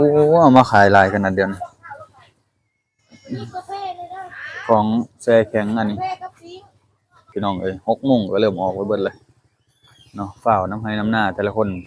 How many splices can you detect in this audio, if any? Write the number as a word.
one